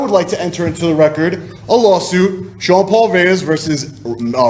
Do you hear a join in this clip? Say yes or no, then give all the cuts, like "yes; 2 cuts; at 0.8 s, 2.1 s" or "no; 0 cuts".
no; 0 cuts